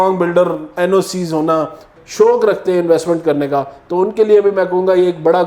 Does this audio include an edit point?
yes; 1 cut; at 1.9 s

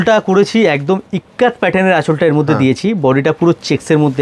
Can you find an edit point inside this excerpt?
no; 0 cuts

